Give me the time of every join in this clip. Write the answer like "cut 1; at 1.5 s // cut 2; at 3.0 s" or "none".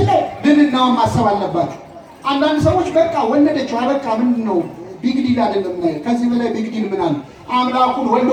none